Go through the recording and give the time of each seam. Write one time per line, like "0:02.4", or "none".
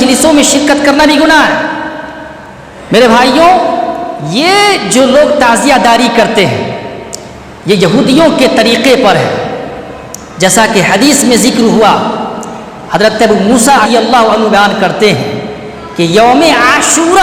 0:13.9